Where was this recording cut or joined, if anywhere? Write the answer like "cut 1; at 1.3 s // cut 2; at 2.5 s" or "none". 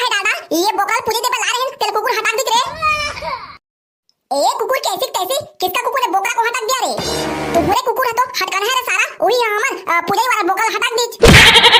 none

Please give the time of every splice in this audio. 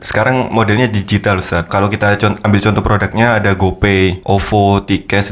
cut 1; at 1.7 s // cut 2; at 4.2 s

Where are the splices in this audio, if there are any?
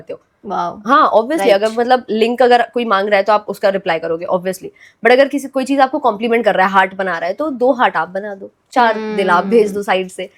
none

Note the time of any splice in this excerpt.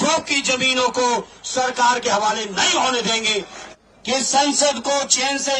cut 1; at 3.6 s

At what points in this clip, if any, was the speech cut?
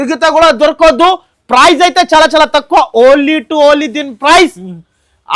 none

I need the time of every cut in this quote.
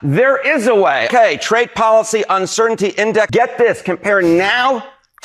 cut 1; at 1.1 s // cut 2; at 3.3 s

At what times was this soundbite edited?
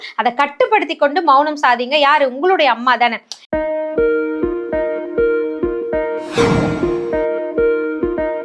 cut 1; at 3.3 s

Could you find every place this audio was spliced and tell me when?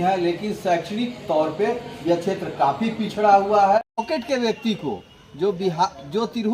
cut 1; at 4.0 s

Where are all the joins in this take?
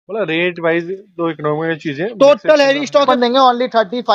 cut 1; at 3.1 s

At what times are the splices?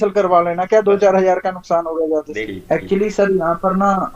cut 1; at 2.4 s

